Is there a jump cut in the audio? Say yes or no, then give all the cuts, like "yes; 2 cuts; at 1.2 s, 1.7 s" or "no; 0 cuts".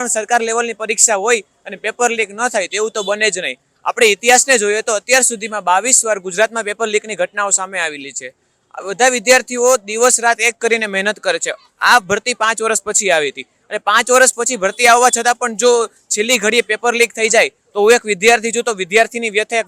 no; 0 cuts